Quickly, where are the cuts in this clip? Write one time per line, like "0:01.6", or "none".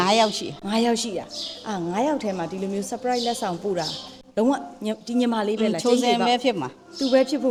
none